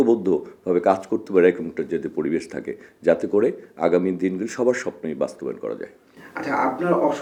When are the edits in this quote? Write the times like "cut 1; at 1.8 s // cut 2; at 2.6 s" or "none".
none